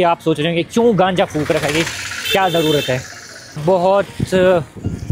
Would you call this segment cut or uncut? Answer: cut